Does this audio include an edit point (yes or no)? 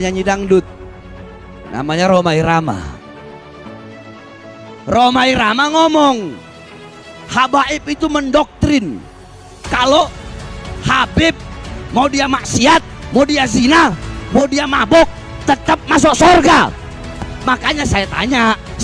no